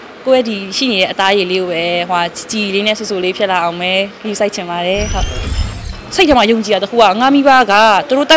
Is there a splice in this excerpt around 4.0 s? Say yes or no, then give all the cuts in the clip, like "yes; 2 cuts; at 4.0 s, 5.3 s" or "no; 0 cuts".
no; 1 cut; at 5.5 s